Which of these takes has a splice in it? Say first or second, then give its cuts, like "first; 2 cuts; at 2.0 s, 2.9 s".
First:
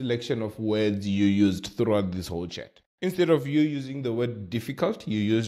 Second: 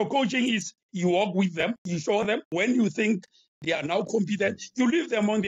second; 2 cuts; at 2.3 s, 3.6 s